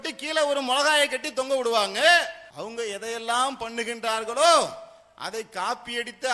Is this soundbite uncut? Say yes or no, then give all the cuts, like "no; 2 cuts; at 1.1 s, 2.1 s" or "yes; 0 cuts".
no; 1 cut; at 2.4 s